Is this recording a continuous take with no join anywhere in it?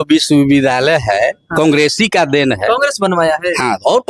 yes; 0 cuts

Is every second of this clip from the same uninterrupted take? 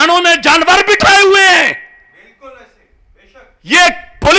yes; 0 cuts

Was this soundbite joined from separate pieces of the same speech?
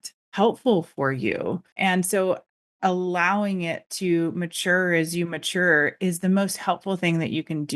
yes; 1 cut; at 1.7 s

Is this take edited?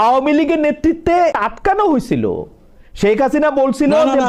yes; 1 cut; at 1.4 s

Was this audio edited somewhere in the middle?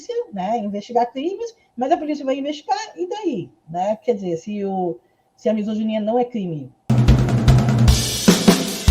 yes; 1 cut; at 6.8 s

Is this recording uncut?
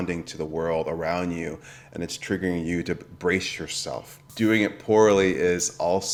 yes; 0 cuts

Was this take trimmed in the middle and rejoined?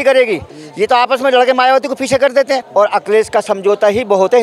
yes; 1 cut; at 2.7 s

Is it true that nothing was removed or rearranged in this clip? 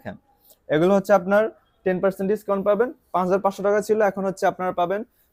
yes; 0 cuts

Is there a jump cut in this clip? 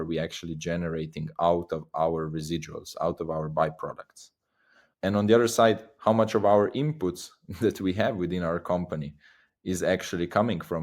no; 0 cuts

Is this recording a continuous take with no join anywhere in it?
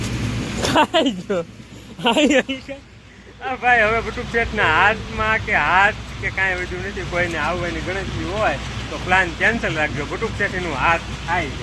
yes; 0 cuts

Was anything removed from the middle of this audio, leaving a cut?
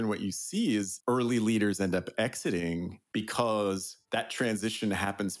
yes; 2 cuts; at 3.0 s, 3.9 s

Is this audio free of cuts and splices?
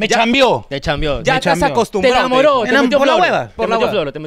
yes; 0 cuts

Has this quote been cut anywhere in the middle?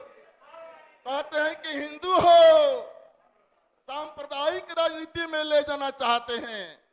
no; 0 cuts

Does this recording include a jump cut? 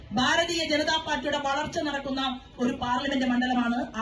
no; 0 cuts

